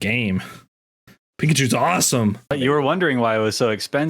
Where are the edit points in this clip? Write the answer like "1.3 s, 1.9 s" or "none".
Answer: 2.5 s